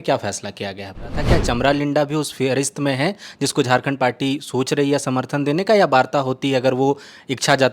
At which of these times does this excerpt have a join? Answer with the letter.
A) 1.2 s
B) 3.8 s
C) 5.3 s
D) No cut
A